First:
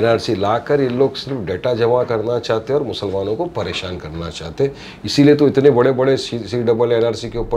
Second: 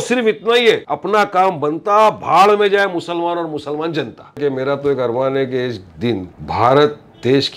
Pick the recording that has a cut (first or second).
second